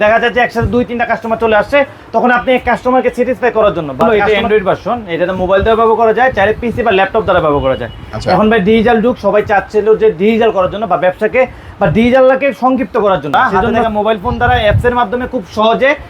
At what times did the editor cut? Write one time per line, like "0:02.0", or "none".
0:04.1
0:13.5